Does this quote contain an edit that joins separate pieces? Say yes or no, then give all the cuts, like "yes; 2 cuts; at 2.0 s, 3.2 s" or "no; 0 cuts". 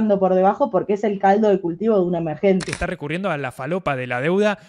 yes; 1 cut; at 2.7 s